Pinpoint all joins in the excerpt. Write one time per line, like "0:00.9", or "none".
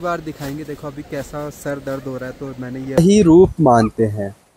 0:03.0